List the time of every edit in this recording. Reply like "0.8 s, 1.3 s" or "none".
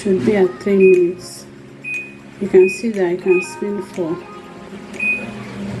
none